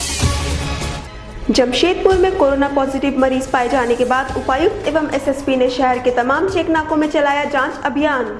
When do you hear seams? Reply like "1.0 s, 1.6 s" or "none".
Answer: 0.9 s